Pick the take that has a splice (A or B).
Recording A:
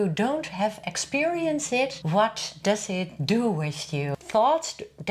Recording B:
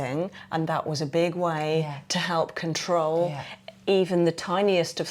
A